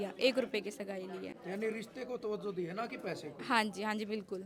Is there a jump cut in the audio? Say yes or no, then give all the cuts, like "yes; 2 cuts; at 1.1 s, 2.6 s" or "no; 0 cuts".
no; 0 cuts